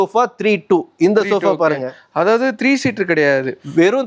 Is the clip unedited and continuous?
yes; 0 cuts

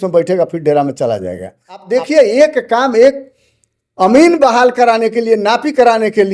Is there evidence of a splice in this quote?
yes; 1 cut; at 1.8 s

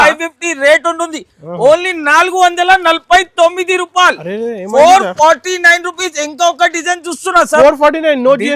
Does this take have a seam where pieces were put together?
no; 0 cuts

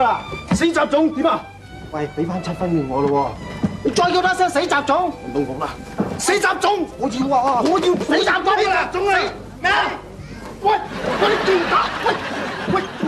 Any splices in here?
no; 0 cuts

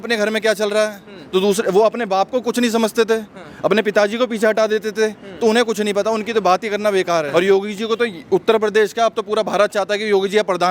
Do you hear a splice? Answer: yes; 1 cut; at 7.3 s

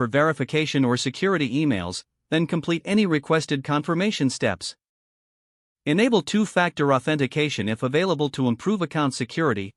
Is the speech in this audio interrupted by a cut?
no; 0 cuts

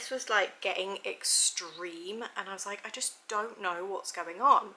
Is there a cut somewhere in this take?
no; 0 cuts

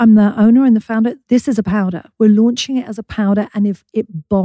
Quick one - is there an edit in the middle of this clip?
yes; 1 cut; at 1.2 s

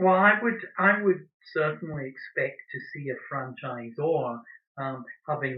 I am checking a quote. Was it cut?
no; 0 cuts

